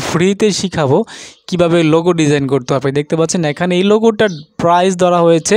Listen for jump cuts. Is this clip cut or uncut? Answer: uncut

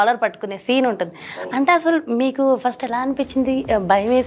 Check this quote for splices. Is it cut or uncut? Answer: uncut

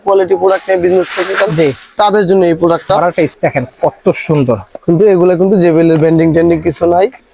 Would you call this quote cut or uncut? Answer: cut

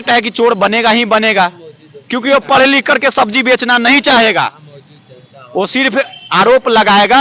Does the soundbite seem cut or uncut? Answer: uncut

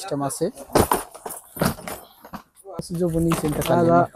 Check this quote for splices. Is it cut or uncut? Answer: cut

